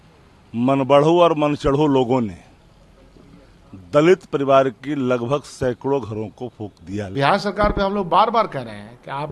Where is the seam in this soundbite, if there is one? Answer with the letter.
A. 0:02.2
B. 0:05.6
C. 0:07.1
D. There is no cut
C